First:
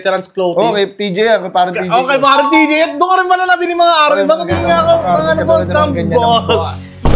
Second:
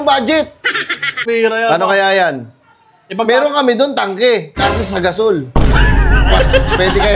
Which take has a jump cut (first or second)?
second